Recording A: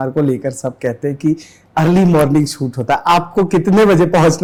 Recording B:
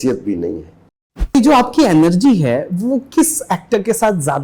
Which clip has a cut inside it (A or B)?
B